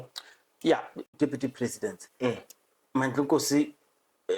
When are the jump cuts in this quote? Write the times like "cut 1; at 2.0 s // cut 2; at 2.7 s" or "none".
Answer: cut 1; at 1.1 s